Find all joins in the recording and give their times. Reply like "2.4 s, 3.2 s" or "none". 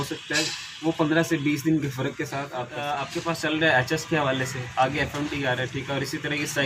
2.8 s